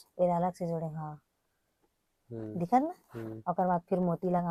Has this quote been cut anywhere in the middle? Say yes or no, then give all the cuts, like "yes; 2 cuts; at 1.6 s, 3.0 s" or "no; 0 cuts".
no; 0 cuts